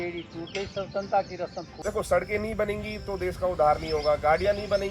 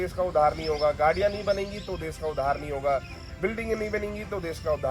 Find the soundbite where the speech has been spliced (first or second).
first